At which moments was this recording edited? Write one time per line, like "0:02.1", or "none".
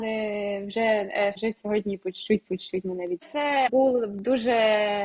0:01.4
0:03.3

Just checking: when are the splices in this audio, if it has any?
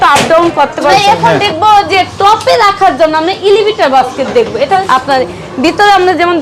0:00.9
0:04.8

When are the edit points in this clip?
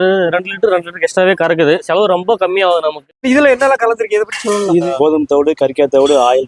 0:01.8
0:03.1
0:04.9

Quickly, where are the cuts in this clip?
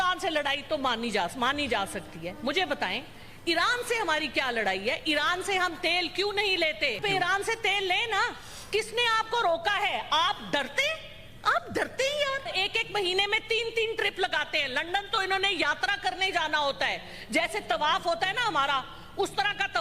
0:07.0
0:12.5

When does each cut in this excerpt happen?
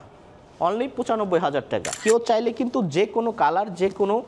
0:01.9

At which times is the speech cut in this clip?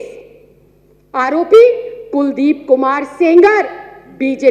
none

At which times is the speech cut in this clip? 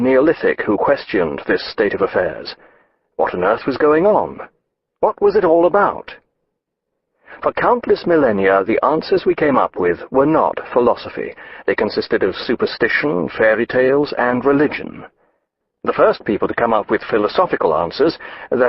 0:14.0

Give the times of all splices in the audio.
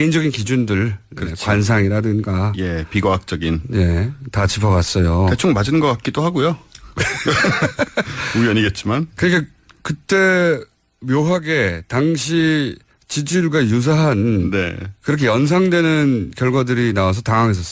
0:07.9

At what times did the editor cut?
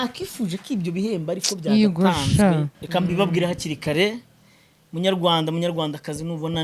0:02.8

